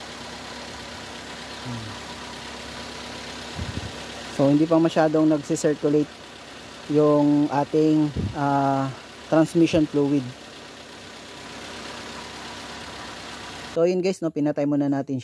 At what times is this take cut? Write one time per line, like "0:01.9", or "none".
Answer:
0:13.7